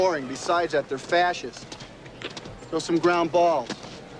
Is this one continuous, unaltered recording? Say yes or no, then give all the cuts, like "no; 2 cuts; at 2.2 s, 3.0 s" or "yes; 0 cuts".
yes; 0 cuts